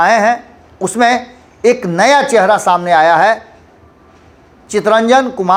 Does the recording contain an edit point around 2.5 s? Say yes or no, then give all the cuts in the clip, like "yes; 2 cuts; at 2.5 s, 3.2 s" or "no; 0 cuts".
no; 0 cuts